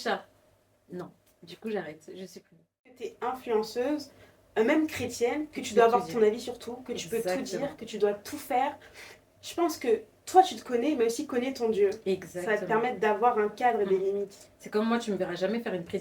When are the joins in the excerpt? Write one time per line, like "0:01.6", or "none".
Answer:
0:03.1